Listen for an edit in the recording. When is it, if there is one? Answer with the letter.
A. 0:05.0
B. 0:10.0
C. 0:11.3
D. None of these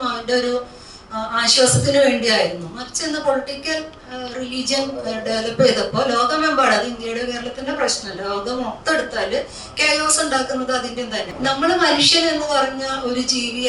C